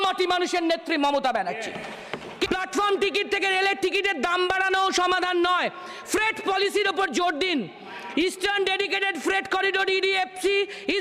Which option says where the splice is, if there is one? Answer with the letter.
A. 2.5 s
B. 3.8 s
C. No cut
A